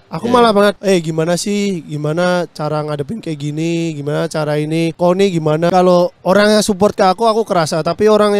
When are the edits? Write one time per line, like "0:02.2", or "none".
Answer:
0:05.7